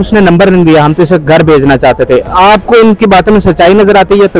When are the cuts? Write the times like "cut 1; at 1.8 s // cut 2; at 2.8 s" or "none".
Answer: none